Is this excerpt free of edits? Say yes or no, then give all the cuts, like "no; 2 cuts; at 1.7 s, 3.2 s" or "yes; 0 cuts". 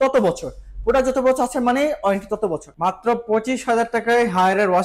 no; 1 cut; at 2.7 s